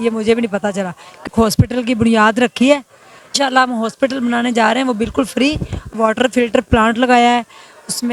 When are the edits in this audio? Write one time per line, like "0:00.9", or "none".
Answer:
0:01.3
0:03.3
0:05.9